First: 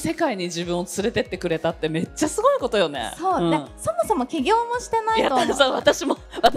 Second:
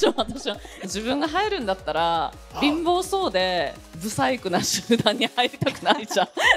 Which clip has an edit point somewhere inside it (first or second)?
second